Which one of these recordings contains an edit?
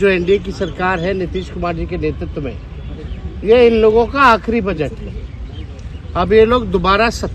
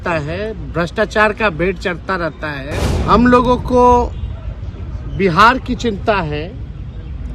second; 1 cut; at 2.9 s

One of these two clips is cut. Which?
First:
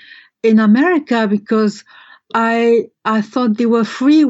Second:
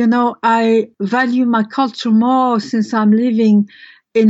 second; 1 cut; at 0.9 s

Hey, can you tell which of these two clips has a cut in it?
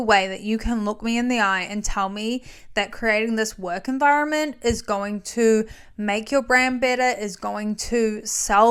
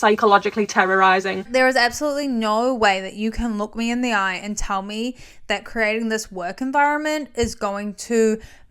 second; 1 cut; at 1.4 s

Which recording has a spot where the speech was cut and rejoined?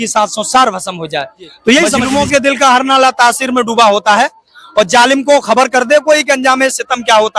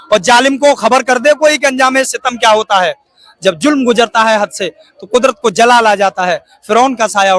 first; 1 cut; at 2.1 s

